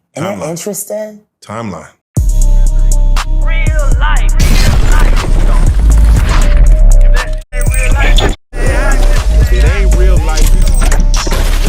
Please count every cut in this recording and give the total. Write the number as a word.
one